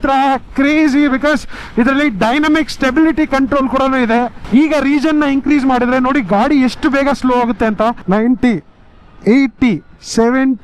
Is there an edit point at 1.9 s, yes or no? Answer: no